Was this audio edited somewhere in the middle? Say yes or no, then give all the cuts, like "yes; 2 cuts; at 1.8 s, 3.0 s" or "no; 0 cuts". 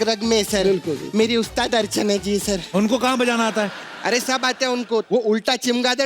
yes; 3 cuts; at 1.0 s, 2.6 s, 5.0 s